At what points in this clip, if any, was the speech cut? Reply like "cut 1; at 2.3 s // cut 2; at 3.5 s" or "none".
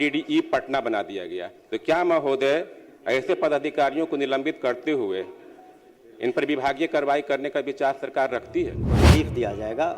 cut 1; at 9.0 s